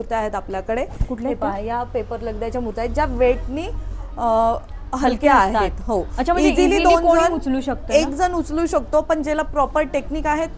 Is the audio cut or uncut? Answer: uncut